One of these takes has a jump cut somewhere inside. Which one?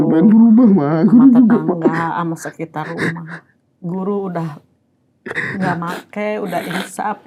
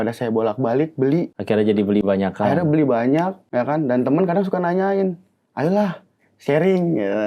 second; 2 cuts; at 1.3 s, 3.4 s

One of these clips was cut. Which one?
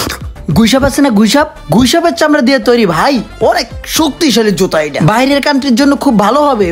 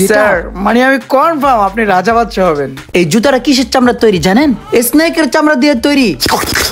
second; 1 cut; at 2.8 s

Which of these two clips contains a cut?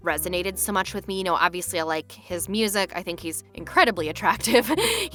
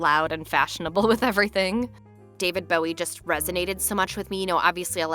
second; 1 cut; at 1.9 s

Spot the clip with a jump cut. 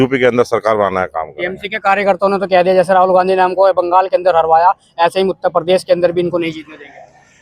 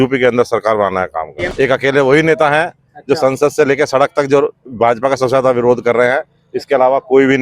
second; 1 cut; at 1.5 s

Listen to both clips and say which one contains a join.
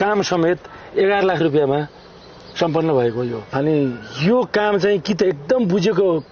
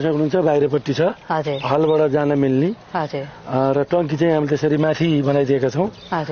first; 1 cut; at 3.4 s

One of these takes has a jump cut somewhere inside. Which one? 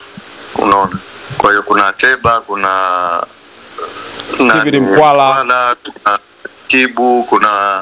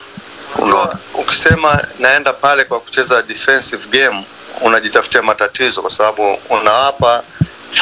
second; 1 cut; at 1.0 s

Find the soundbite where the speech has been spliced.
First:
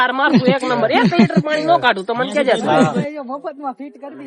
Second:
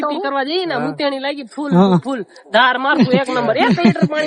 first; 1 cut; at 3.0 s

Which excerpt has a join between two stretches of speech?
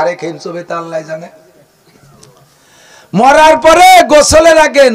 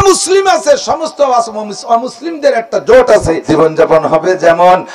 second; 1 cut; at 3.4 s

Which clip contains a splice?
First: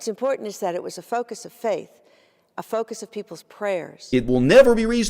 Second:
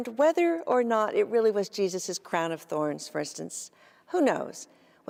first; 1 cut; at 3.9 s

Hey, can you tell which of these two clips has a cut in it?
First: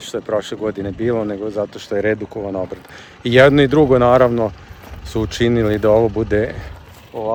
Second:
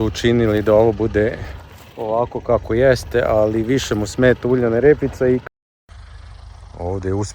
second; 1 cut; at 5.4 s

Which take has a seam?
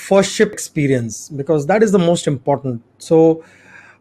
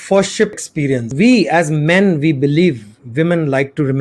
second; 1 cut; at 1.1 s

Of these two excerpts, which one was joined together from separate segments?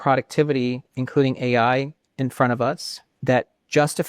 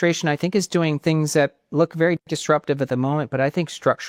first; 1 cut; at 3.1 s

